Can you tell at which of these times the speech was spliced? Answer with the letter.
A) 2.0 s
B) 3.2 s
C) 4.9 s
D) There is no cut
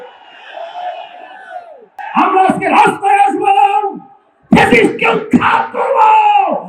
A